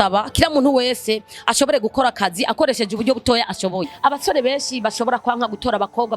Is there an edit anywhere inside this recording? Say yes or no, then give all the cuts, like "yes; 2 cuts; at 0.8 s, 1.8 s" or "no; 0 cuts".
yes; 1 cut; at 3.9 s